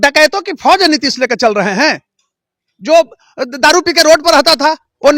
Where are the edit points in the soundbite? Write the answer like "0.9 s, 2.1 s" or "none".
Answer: none